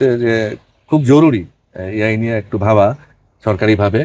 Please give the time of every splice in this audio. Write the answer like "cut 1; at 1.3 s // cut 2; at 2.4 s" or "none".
none